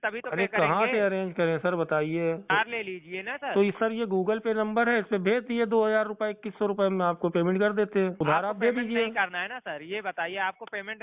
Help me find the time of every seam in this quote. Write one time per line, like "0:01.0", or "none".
0:02.5
0:08.1